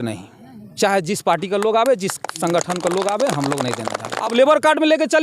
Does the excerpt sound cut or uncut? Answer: cut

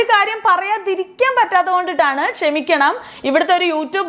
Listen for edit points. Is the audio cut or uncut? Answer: uncut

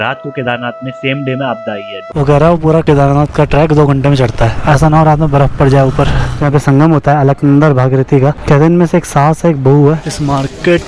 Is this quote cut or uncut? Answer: cut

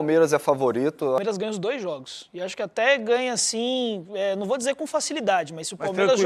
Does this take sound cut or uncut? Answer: cut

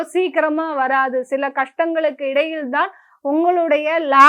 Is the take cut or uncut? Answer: uncut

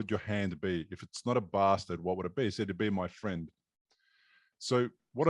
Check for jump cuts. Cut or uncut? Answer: uncut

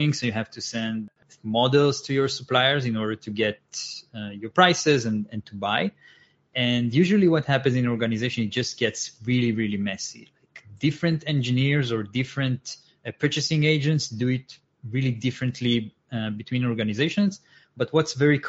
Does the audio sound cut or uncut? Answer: cut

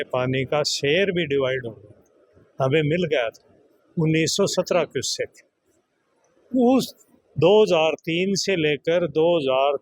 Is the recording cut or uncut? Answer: uncut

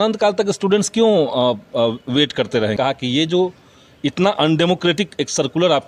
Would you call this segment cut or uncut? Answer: cut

